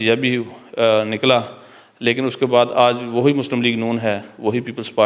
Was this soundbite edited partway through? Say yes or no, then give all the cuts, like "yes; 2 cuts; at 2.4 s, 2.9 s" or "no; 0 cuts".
no; 0 cuts